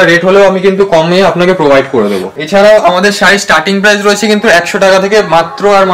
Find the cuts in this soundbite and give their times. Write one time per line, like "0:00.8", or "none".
0:02.2